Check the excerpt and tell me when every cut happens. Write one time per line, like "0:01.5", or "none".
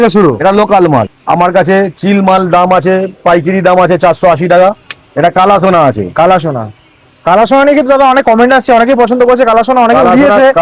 0:01.1
0:04.8